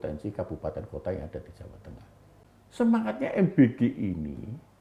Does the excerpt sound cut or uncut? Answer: cut